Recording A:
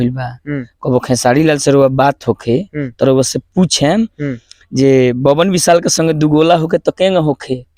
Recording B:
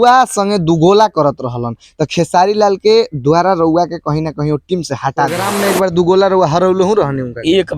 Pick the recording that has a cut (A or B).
B